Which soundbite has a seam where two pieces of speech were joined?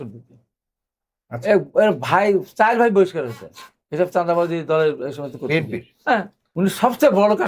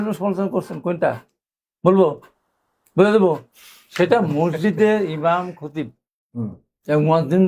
first; 1 cut; at 6.4 s

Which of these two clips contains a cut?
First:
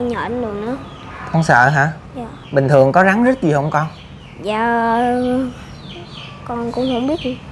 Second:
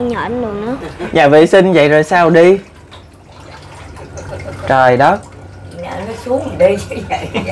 second; 1 cut; at 0.9 s

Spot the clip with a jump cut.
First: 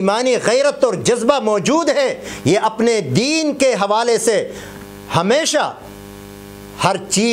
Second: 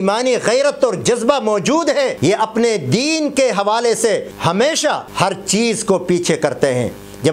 second; 3 cuts; at 2.1 s, 4.3 s, 5.1 s

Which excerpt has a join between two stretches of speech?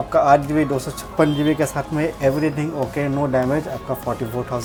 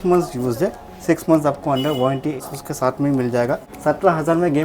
second; 2 cuts; at 2.5 s, 3.7 s

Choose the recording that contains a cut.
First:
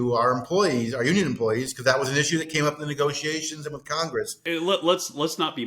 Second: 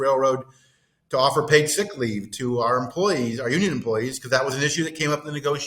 first; 1 cut; at 4.4 s

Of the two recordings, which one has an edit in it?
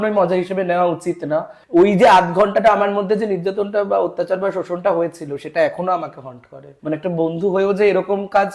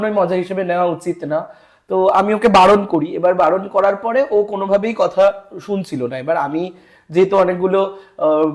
first; 2 cuts; at 1.6 s, 6.7 s

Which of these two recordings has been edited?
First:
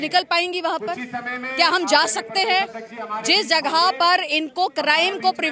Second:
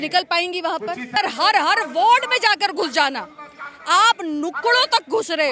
second; 1 cut; at 1.2 s

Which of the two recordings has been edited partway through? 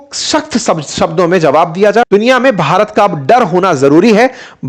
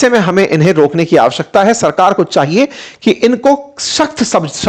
first; 1 cut; at 2.1 s

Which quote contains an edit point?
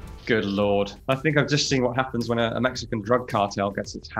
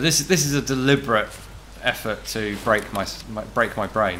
first; 1 cut; at 1.0 s

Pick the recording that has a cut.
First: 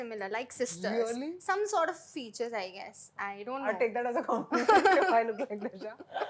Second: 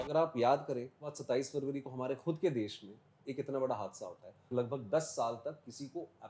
second; 2 cuts; at 1.2 s, 4.5 s

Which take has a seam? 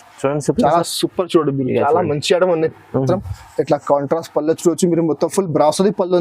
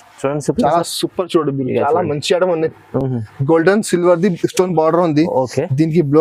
first; 1 cut; at 3.0 s

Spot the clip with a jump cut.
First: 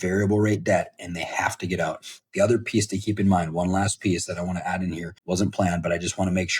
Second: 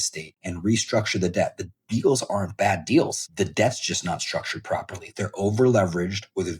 first; 1 cut; at 5.1 s

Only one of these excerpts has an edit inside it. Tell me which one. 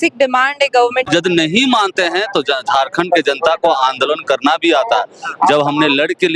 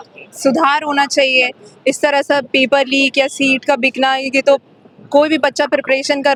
first; 1 cut; at 1.1 s

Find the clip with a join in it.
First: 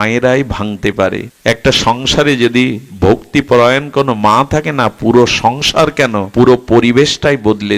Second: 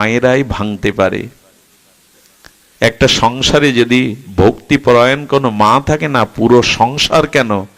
first; 2 cuts; at 1.3 s, 6.2 s

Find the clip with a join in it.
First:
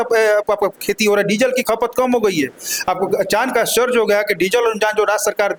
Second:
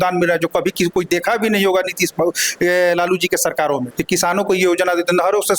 second; 1 cut; at 3.9 s

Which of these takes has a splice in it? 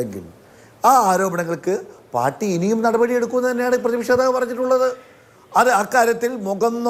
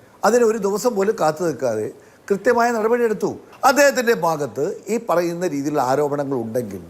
second; 1 cut; at 3.4 s

